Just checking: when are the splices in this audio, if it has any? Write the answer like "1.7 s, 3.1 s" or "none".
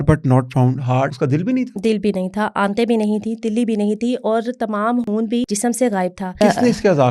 1.1 s, 5.5 s, 6.4 s

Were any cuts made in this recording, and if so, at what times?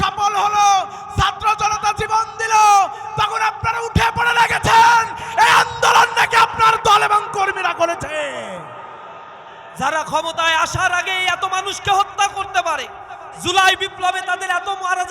9.5 s

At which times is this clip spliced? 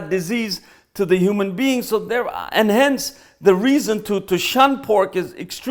none

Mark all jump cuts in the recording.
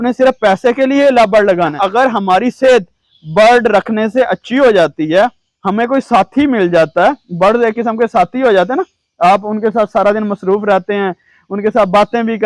1.7 s

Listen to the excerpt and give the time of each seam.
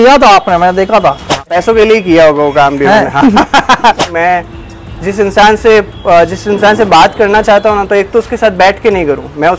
1.4 s, 4.0 s

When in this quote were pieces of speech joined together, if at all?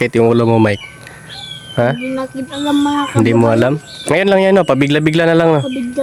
none

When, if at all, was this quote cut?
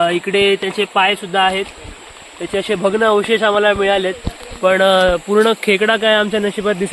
none

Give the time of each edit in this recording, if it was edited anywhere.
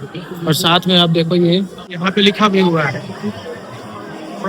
1.8 s

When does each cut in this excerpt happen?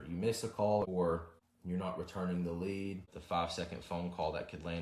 1.1 s, 3.0 s

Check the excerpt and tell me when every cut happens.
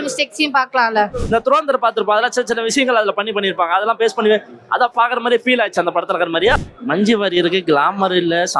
1.2 s, 6.5 s

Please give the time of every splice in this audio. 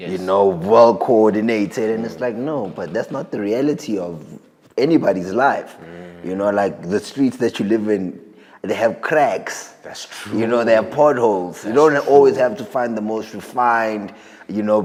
none

